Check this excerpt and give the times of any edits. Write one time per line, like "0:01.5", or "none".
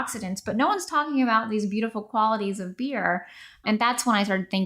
0:03.6